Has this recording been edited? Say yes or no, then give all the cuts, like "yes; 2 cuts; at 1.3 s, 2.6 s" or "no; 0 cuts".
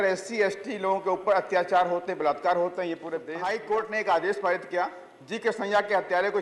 yes; 1 cut; at 3.3 s